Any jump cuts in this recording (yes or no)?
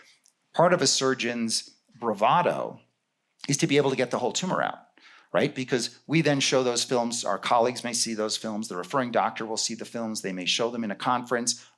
no